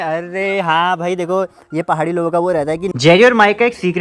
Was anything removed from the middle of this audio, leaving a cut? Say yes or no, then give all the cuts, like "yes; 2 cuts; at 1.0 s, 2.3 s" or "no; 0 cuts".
yes; 1 cut; at 2.9 s